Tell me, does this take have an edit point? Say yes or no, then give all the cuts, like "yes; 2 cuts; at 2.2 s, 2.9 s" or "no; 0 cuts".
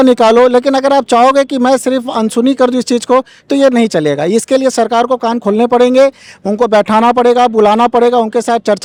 no; 0 cuts